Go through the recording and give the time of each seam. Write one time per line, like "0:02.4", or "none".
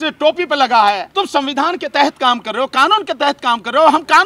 0:01.1

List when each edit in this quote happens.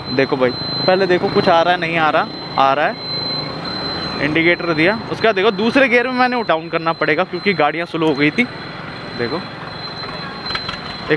0:06.5

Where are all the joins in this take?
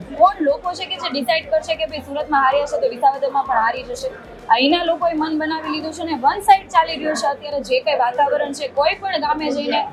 none

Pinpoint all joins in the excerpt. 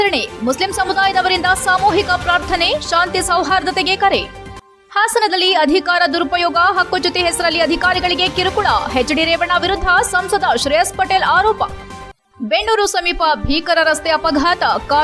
none

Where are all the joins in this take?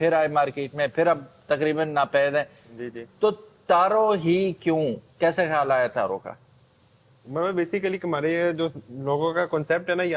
none

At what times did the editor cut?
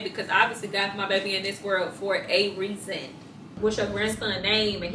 0:03.5

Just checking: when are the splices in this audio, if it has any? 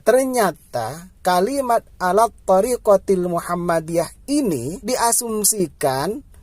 0:04.8

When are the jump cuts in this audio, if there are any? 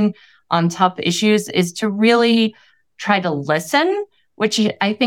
none

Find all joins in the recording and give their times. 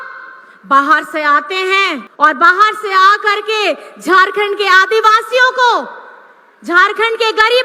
0:02.0

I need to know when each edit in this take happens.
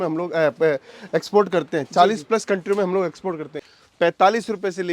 0:03.6

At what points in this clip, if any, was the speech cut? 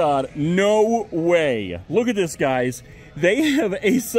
none

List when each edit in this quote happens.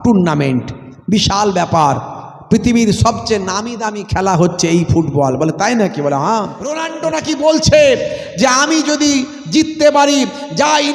0:06.9

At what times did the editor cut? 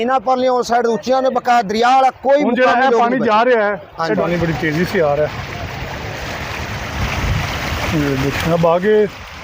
0:04.2

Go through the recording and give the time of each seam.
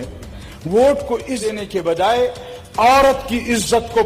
0:01.4

